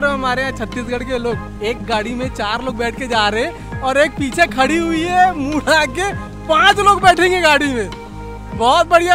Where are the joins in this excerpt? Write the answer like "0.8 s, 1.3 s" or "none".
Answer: none